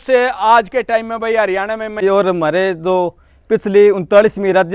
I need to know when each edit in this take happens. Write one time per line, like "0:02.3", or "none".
0:02.0